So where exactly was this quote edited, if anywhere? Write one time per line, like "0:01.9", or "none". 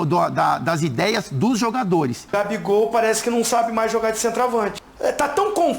0:02.2
0:04.8